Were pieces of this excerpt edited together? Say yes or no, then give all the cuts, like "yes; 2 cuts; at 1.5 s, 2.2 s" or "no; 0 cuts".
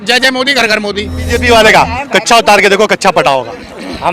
yes; 1 cut; at 1.3 s